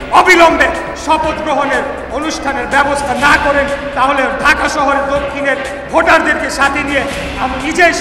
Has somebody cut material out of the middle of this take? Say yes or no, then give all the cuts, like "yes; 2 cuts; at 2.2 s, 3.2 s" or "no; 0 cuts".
no; 0 cuts